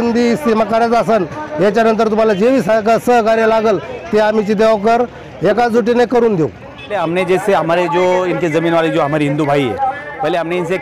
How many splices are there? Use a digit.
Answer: 1